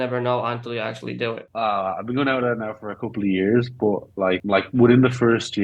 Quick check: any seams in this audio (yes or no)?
yes